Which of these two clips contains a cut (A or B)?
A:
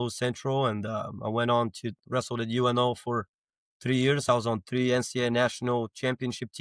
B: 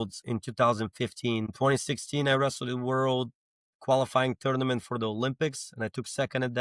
B